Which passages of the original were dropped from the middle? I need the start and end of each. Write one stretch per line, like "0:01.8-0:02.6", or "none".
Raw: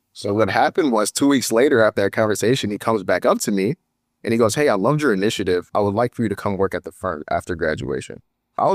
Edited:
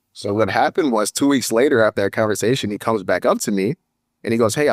none